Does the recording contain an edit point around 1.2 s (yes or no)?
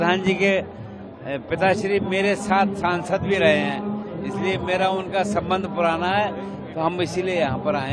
no